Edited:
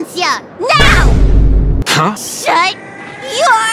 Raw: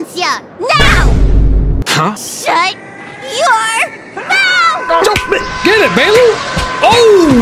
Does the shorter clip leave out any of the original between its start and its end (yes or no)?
no